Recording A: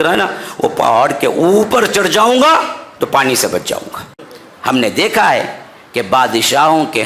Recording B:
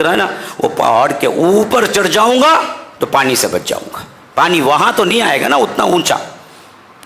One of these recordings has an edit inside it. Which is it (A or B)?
A